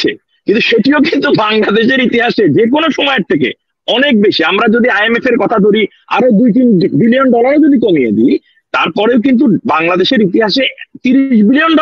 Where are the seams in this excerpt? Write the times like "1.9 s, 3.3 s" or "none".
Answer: none